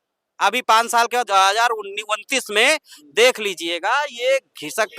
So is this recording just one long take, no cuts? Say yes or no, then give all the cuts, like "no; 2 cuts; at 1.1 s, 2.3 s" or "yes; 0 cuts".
no; 1 cut; at 1.3 s